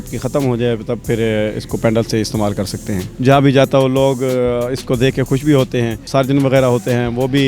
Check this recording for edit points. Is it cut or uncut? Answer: cut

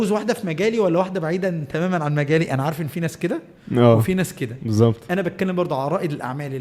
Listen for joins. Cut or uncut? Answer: uncut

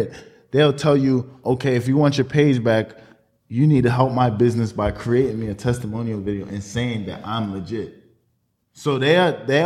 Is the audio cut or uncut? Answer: uncut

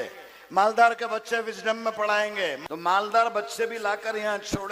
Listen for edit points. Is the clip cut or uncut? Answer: cut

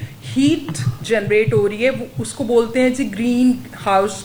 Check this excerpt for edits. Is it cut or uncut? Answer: uncut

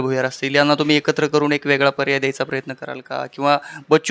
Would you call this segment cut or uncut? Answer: uncut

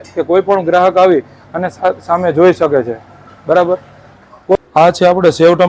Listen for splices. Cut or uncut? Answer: cut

